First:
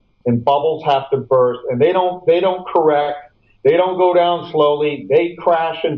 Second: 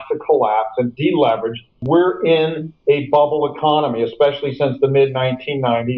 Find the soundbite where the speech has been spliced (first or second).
second